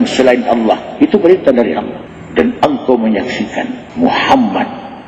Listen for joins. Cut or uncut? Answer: cut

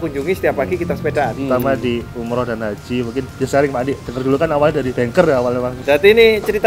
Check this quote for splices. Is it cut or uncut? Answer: cut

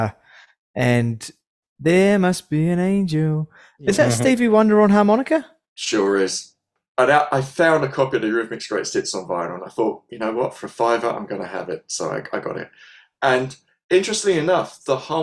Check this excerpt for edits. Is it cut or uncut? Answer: cut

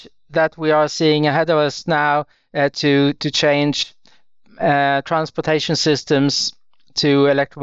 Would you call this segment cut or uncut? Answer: uncut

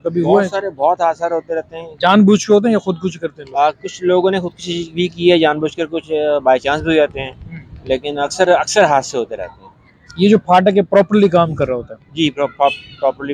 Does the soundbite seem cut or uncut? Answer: uncut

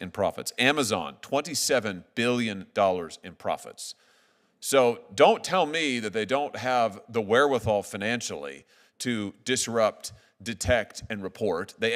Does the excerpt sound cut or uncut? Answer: uncut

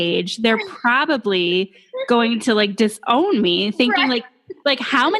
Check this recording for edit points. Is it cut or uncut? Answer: uncut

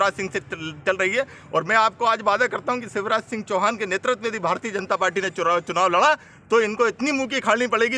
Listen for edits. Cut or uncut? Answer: uncut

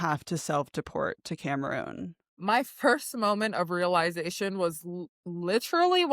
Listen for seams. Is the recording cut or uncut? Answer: cut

